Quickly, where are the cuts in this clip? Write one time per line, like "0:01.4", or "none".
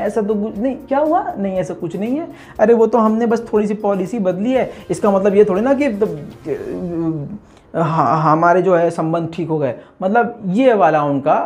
none